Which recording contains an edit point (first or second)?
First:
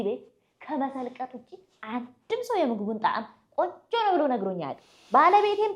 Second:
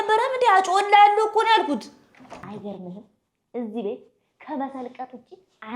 second